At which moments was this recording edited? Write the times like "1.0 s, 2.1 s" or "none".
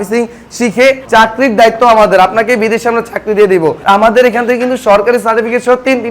1.0 s, 3.8 s